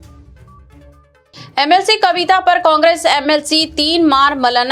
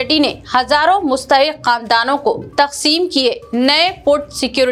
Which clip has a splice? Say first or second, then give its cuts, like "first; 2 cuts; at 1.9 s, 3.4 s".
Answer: first; 1 cut; at 1.1 s